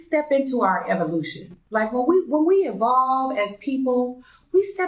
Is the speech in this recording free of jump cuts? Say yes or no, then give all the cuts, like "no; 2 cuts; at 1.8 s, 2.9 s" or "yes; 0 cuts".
yes; 0 cuts